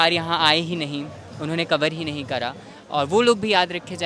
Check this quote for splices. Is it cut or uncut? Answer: uncut